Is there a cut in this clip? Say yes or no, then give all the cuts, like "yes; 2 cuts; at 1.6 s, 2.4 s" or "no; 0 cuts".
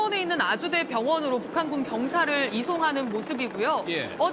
yes; 1 cut; at 1.9 s